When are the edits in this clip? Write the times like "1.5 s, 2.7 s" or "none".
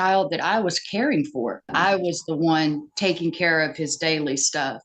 1.7 s